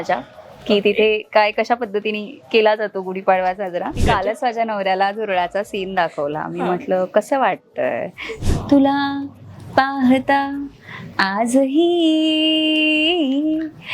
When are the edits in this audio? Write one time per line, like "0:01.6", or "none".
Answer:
0:04.0
0:08.4